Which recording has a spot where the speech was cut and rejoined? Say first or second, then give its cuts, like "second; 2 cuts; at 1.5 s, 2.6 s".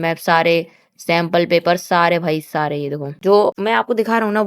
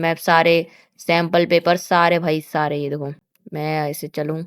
first; 1 cut; at 3.2 s